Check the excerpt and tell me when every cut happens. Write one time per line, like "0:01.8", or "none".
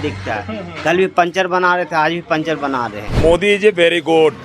0:03.2